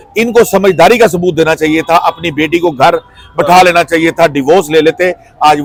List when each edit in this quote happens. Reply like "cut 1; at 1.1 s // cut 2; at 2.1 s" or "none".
none